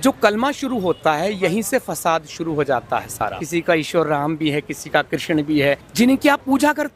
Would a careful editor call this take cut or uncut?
cut